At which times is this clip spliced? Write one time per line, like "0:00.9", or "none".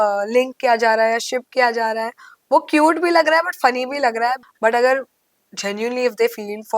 0:04.4